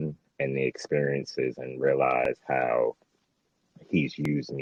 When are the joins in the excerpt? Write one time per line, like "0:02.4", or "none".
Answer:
none